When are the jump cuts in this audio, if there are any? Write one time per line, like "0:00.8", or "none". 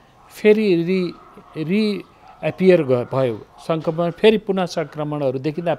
none